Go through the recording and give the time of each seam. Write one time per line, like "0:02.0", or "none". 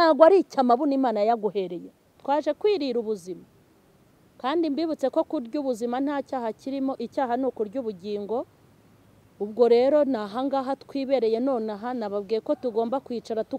0:02.2